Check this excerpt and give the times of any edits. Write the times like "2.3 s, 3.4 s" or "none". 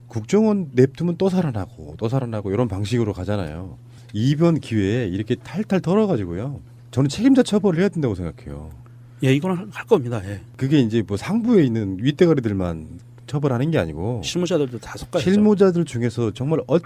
none